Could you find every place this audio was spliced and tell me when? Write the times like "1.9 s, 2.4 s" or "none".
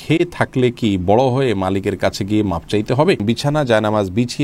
3.2 s